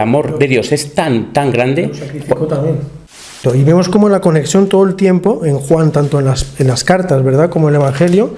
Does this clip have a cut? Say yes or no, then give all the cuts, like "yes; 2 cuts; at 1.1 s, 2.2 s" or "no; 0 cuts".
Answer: yes; 1 cut; at 3.2 s